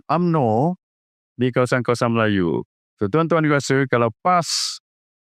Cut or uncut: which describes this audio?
uncut